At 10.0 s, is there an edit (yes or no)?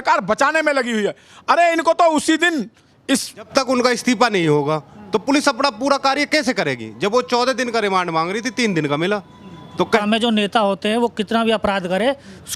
yes